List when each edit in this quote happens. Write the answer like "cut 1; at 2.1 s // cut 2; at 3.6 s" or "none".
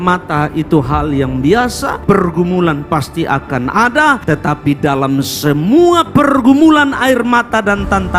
cut 1; at 4.2 s